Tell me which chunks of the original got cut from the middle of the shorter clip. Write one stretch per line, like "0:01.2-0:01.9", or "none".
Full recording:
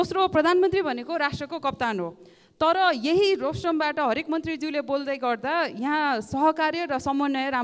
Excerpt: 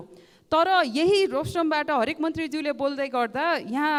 none